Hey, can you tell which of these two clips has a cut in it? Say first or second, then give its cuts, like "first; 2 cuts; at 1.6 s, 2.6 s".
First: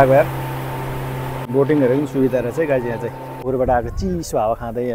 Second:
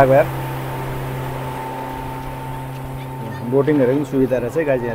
first; 2 cuts; at 1.3 s, 3.4 s